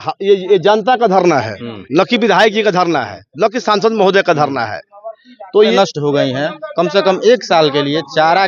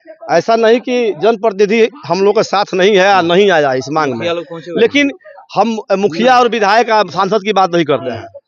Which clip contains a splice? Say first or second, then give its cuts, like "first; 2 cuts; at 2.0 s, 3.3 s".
first; 1 cut; at 5.7 s